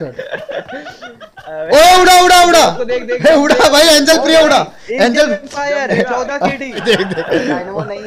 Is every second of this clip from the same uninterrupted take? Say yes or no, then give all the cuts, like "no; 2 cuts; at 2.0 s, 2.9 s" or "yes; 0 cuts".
no; 1 cut; at 6.8 s